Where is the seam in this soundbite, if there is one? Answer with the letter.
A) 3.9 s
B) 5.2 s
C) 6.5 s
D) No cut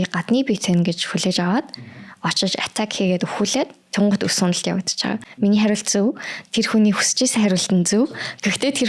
B